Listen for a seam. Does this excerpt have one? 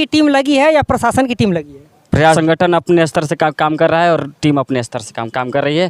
yes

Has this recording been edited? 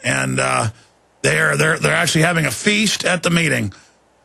no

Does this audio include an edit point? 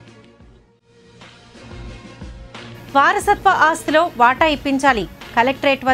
yes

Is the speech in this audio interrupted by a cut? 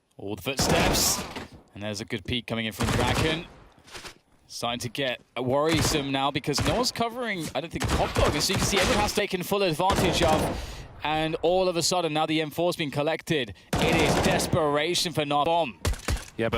yes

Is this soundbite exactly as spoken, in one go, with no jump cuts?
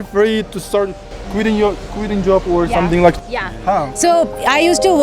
no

